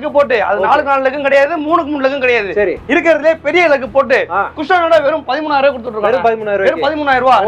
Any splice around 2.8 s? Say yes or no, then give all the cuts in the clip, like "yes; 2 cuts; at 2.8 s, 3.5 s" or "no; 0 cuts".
no; 0 cuts